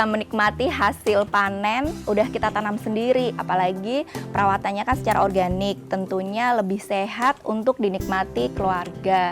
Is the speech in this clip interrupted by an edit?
yes; 2 cuts; at 2.0 s, 3.4 s

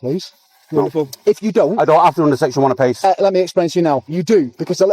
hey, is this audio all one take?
yes; 0 cuts

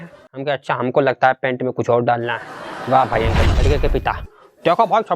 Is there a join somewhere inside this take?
yes; 1 cut; at 3.5 s

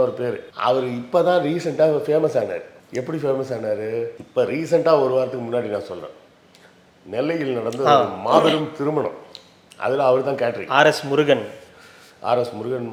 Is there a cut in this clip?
no; 0 cuts

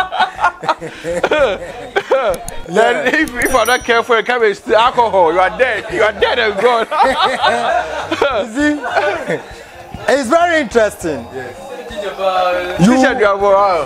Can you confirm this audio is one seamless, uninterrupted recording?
yes; 0 cuts

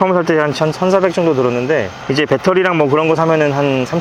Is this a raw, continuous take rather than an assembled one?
yes; 0 cuts

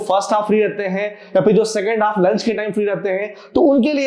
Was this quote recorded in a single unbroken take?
yes; 0 cuts

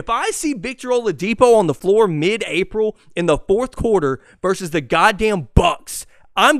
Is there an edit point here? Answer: yes; 1 cut; at 1.8 s

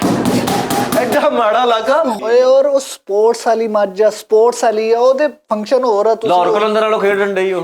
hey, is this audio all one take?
no; 1 cut; at 2.2 s

